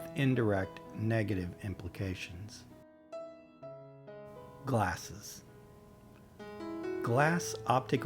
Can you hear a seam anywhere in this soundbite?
yes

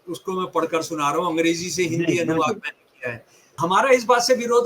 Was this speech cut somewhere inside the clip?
yes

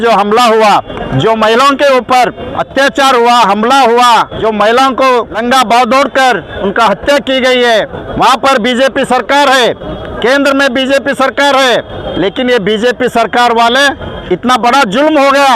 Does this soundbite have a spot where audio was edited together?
yes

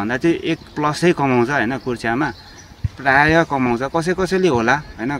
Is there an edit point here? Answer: no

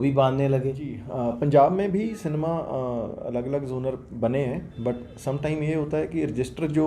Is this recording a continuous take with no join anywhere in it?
no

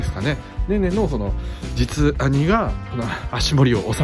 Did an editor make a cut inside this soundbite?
yes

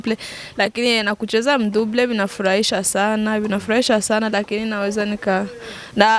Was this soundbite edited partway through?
no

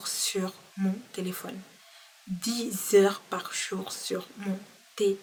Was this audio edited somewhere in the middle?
no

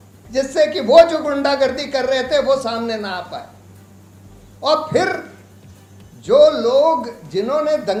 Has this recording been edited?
no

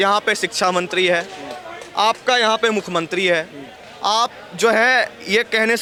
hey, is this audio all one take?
yes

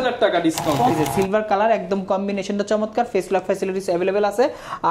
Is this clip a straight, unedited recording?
no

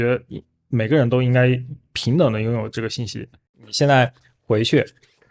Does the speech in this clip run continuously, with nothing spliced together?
yes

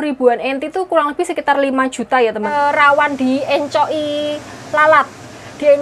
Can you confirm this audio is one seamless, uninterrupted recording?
no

